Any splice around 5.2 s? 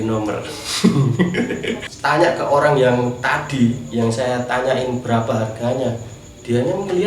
no; 1 cut; at 1.8 s

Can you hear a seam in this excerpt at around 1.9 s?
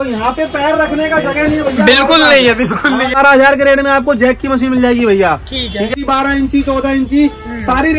no; 2 cuts; at 3.2 s, 5.9 s

